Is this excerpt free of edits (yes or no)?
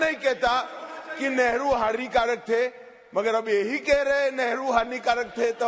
yes